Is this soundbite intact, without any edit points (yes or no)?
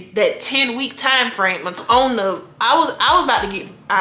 no